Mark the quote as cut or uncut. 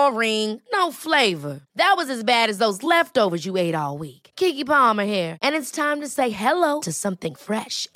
uncut